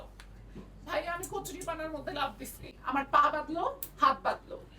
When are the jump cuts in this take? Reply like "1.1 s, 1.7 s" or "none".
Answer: 2.8 s

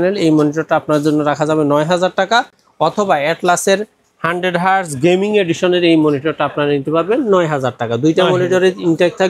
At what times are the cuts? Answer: none

